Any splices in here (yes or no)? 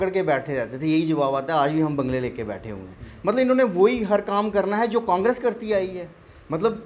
no